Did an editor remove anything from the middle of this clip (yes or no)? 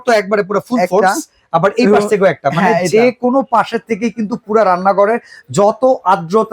no